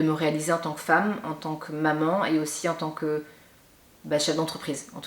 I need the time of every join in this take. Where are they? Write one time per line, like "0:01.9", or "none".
none